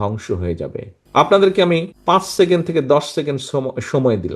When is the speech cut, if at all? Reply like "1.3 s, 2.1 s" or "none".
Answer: 1.0 s

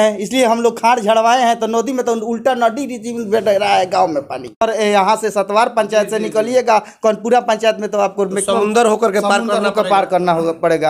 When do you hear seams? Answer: 4.6 s

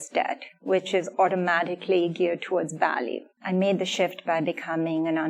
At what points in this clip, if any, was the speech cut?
3.3 s

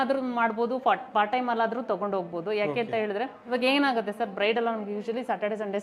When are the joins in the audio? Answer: none

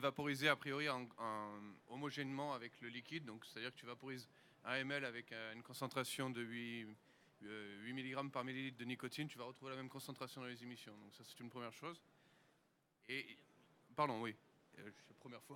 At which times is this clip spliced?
7.0 s

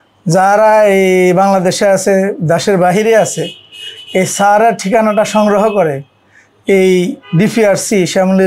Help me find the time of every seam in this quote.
none

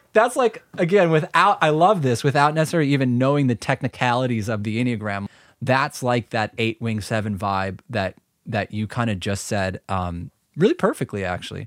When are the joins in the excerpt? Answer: 5.2 s

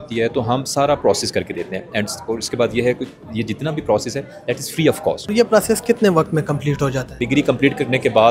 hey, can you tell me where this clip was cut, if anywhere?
5.3 s, 7.2 s

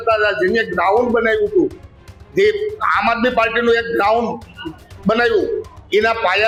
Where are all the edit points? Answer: none

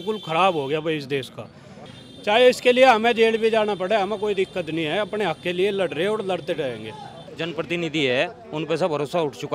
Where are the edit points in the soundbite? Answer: 1.9 s, 7.2 s

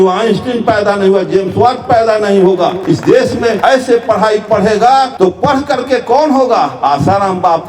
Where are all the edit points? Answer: 2.8 s, 3.6 s, 5.1 s

